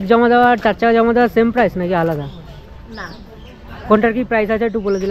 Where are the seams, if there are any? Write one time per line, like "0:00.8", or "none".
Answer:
none